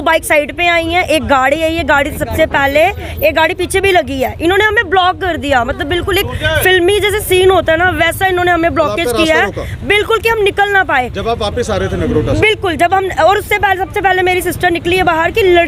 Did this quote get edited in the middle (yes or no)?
no